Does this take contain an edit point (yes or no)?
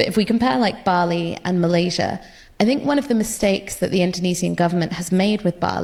no